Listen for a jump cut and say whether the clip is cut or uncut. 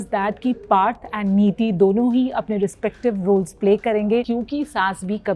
cut